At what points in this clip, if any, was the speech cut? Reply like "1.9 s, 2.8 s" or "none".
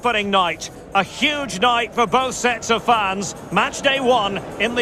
none